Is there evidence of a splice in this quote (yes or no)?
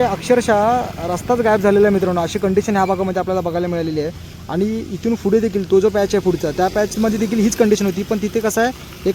no